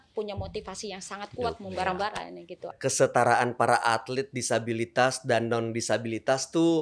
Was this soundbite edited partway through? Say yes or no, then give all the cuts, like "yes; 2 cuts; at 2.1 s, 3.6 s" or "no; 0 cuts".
yes; 1 cut; at 2.7 s